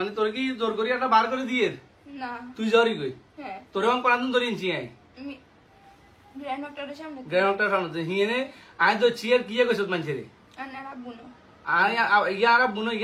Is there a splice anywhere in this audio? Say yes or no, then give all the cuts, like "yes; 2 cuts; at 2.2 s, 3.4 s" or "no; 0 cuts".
no; 0 cuts